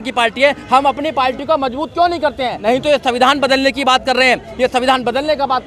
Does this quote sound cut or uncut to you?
cut